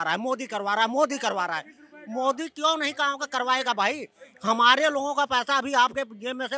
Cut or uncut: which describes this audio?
uncut